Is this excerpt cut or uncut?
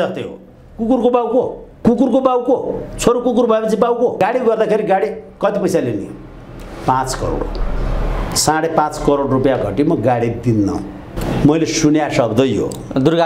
cut